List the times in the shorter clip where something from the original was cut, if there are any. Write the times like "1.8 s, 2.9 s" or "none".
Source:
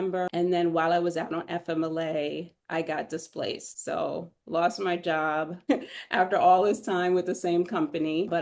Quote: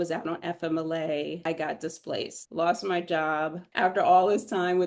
1.4 s, 2.4 s, 3.6 s